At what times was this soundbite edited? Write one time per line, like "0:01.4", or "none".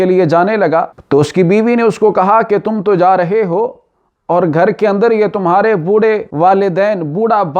0:01.0
0:06.3